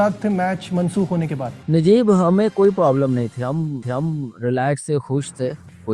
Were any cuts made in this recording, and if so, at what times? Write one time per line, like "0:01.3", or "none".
0:01.5